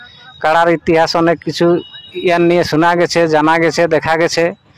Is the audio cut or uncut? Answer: uncut